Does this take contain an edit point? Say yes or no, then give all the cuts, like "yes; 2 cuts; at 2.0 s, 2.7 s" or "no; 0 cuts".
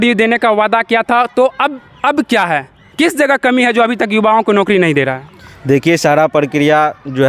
no; 0 cuts